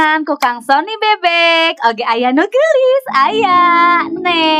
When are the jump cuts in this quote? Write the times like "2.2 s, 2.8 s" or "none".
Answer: none